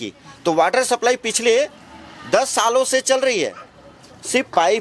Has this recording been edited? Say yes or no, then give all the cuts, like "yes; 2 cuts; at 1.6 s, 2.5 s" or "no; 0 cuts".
no; 0 cuts